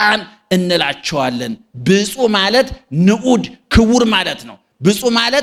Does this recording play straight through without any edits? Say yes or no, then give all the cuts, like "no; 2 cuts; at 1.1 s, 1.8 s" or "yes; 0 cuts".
yes; 0 cuts